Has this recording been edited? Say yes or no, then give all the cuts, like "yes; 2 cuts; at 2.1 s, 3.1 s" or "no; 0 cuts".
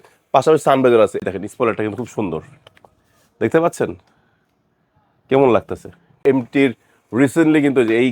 yes; 2 cuts; at 1.2 s, 6.2 s